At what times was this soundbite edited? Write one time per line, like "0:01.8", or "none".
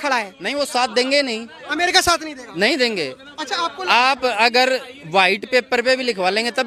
none